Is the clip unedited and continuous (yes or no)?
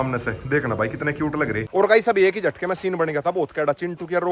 no